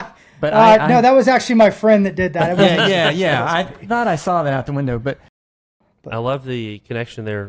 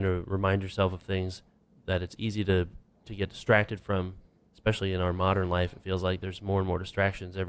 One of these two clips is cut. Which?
first; 1 cut; at 5.3 s

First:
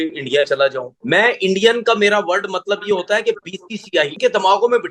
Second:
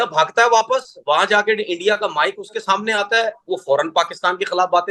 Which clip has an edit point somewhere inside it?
first; 2 cuts; at 0.9 s, 4.1 s

